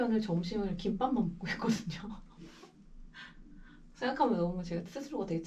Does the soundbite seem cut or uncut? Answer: uncut